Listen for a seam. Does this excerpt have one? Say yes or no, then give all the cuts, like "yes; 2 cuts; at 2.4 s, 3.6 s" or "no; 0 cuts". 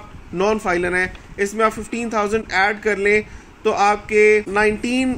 no; 0 cuts